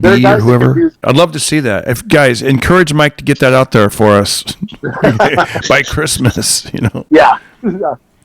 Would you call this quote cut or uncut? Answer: cut